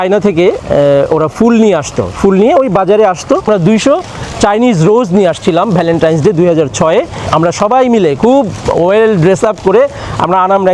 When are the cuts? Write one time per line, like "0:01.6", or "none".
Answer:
0:03.5
0:07.2